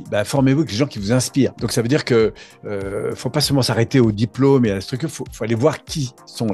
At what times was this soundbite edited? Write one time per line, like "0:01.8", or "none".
none